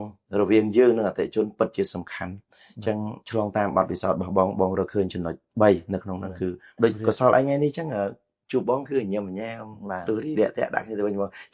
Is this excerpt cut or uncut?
cut